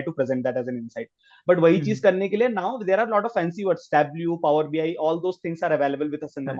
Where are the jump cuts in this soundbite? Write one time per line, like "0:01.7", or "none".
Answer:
none